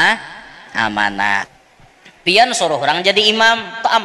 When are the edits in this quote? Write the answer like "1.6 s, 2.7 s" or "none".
1.5 s

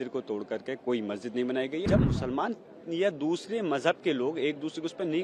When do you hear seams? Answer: 1.8 s

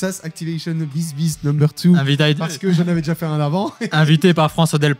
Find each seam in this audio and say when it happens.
none

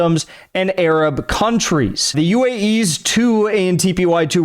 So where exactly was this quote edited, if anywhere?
2.1 s

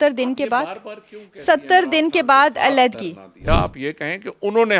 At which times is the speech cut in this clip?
3.5 s

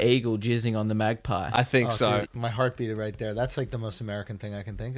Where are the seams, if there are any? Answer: 2.2 s

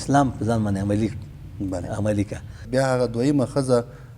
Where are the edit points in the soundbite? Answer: 2.5 s

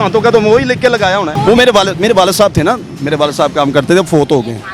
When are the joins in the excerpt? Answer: 1.3 s

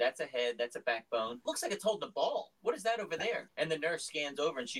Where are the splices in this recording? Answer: 1.4 s, 3.5 s

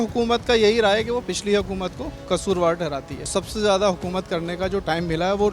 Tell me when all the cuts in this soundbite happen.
2.1 s, 3.4 s

